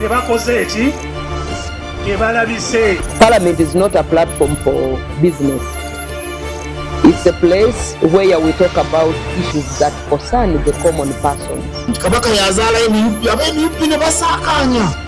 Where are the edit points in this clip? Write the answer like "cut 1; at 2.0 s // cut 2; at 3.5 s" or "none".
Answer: none